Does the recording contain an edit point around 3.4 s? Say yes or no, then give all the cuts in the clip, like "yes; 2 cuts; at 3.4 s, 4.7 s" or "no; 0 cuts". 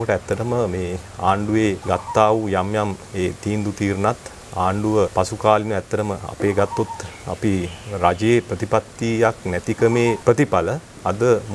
no; 3 cuts; at 1.8 s, 5.1 s, 10.2 s